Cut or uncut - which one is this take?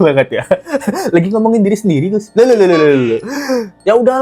uncut